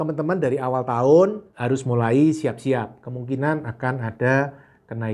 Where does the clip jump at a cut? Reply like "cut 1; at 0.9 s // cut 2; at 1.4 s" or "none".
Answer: none

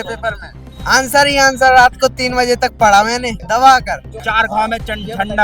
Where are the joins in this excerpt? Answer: cut 1; at 3.4 s // cut 2; at 4.1 s

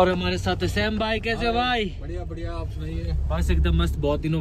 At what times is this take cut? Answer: none

